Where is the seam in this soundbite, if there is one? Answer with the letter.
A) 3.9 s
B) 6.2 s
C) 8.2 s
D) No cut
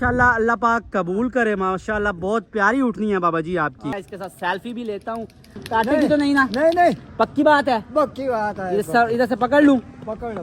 A